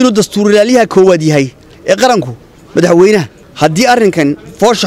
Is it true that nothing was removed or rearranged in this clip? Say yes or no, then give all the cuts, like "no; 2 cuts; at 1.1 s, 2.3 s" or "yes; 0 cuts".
no; 1 cut; at 3.4 s